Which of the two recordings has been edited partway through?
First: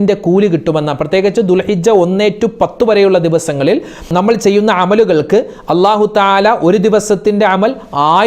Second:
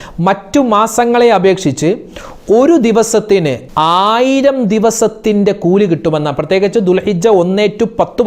second; 1 cut; at 3.6 s

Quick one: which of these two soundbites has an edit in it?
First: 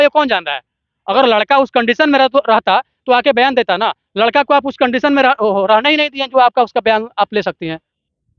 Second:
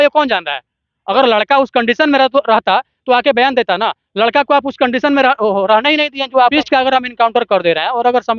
second; 1 cut; at 6.5 s

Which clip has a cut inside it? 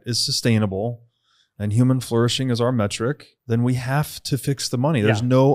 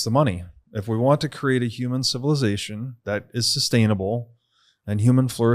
first; 1 cut; at 3.3 s

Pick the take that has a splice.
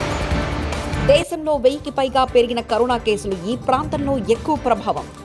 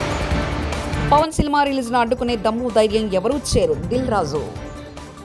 first; 1 cut; at 1.0 s

